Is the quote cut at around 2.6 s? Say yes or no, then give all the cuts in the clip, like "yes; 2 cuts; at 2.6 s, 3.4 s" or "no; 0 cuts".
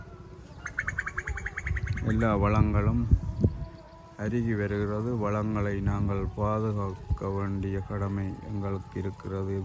no; 0 cuts